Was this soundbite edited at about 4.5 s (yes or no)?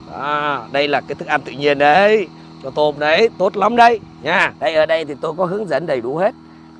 yes